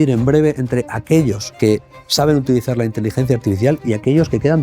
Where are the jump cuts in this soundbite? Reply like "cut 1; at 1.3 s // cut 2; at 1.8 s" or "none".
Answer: cut 1; at 1.5 s